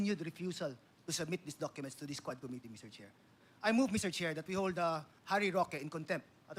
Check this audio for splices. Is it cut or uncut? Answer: uncut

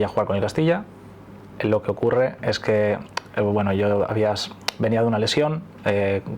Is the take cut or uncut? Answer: uncut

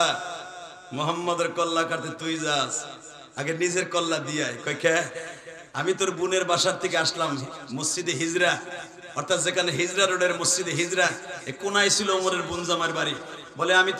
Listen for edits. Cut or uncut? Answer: uncut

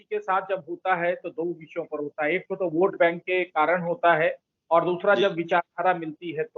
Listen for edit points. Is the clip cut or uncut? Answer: uncut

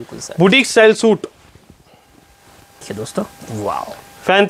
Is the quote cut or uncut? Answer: cut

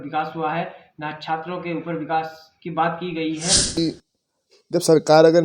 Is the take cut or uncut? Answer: cut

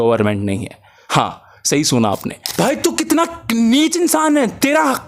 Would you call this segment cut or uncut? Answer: cut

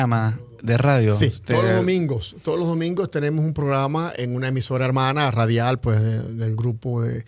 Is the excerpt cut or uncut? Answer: cut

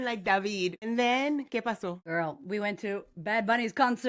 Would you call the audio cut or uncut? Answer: cut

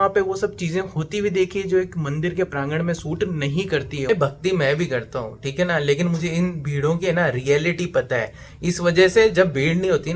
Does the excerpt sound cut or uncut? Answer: cut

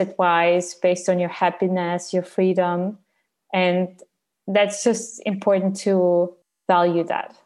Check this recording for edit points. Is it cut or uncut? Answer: cut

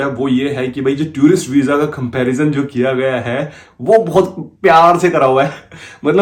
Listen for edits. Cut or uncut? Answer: uncut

